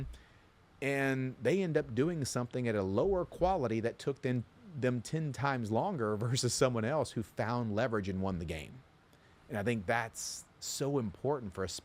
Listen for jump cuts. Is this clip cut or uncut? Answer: uncut